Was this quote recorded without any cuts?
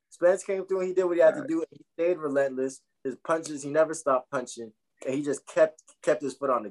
yes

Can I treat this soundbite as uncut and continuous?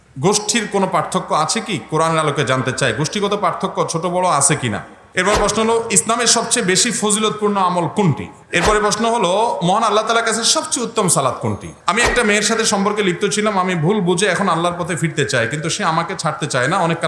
no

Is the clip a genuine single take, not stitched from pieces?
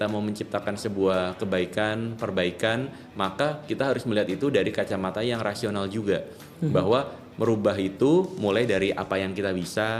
yes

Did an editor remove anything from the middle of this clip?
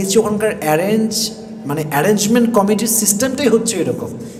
no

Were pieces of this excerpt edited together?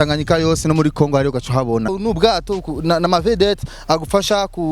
yes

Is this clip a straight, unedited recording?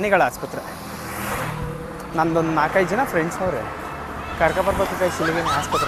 yes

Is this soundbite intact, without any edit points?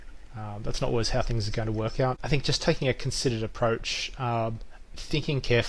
no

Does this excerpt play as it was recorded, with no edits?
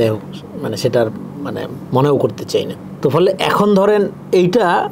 yes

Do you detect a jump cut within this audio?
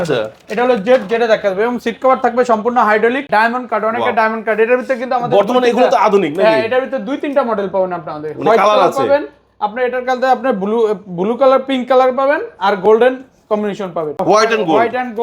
yes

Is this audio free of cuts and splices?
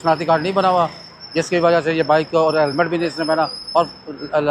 yes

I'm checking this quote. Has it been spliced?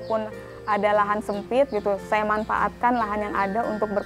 no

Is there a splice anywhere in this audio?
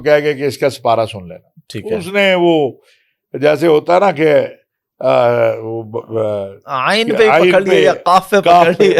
no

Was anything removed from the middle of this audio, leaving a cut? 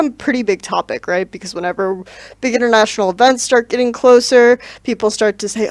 no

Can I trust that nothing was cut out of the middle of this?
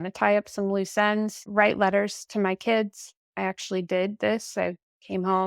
no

